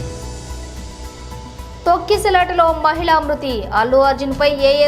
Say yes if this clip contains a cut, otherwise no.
no